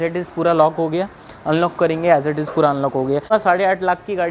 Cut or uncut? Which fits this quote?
cut